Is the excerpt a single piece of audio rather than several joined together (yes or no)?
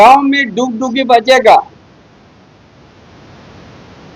yes